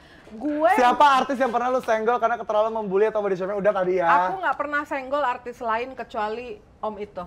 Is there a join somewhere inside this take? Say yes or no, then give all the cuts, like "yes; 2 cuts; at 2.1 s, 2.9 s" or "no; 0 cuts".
no; 0 cuts